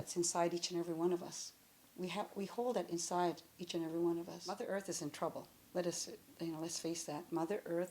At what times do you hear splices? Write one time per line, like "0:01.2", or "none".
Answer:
0:04.6